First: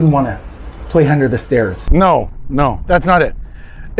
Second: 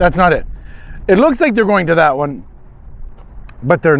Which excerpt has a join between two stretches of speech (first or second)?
first